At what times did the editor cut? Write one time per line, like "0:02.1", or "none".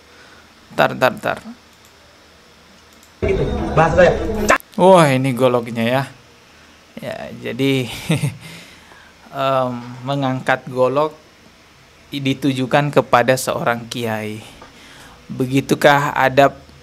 none